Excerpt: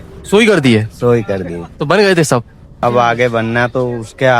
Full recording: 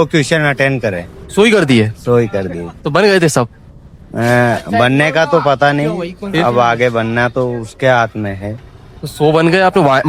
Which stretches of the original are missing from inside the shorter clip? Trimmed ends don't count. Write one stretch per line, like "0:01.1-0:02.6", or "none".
0:03.9-0:06.4